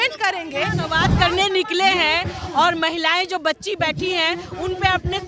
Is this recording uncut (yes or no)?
no